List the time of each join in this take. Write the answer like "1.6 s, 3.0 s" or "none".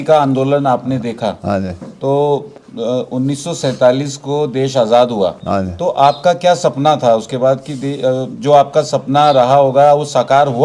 none